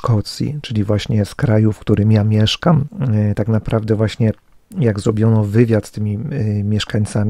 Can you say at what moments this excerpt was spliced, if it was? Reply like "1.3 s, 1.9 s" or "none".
3.2 s